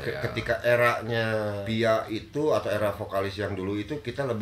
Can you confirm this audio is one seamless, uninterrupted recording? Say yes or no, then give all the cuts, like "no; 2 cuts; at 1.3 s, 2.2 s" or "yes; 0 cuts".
no; 1 cut; at 1.6 s